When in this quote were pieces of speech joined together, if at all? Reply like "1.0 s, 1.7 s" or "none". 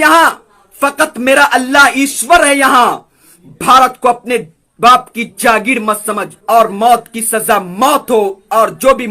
6.3 s